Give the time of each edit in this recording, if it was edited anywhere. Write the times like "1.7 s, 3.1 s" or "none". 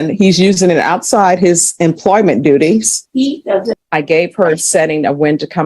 3.8 s